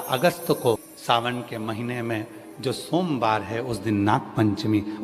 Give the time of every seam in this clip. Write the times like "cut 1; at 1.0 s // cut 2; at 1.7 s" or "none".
cut 1; at 0.9 s